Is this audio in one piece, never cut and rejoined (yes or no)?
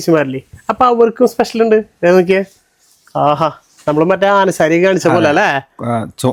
yes